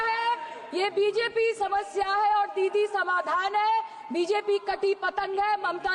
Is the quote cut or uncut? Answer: uncut